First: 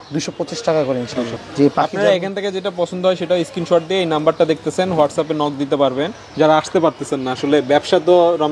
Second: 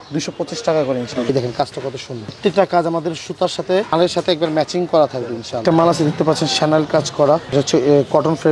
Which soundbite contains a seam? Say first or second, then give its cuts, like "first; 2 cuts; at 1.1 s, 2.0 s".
second; 2 cuts; at 1.2 s, 5.6 s